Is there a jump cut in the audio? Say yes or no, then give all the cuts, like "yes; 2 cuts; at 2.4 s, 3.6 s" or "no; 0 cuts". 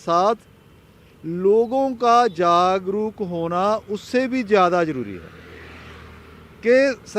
no; 0 cuts